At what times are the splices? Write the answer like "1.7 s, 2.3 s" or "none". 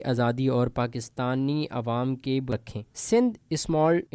2.5 s